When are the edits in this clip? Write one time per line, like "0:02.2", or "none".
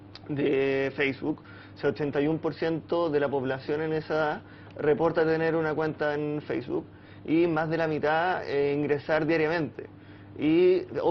0:05.7